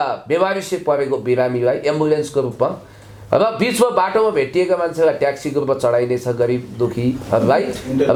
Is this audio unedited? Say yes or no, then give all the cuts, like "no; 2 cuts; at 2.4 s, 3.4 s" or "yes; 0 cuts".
yes; 0 cuts